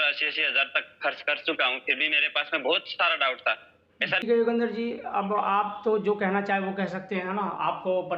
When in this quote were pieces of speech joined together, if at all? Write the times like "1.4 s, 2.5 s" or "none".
4.2 s